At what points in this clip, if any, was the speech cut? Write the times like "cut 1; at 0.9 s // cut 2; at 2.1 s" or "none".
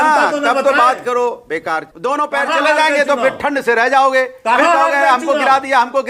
cut 1; at 1.9 s